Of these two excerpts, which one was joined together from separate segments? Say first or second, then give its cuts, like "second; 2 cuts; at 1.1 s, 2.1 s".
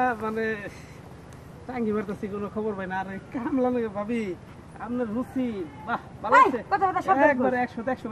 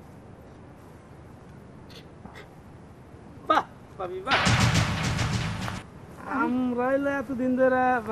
second; 2 cuts; at 4.4 s, 6.2 s